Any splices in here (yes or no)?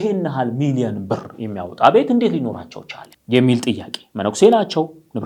no